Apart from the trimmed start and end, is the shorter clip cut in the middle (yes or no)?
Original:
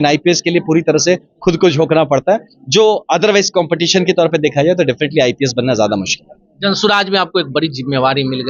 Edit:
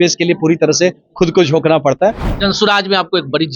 yes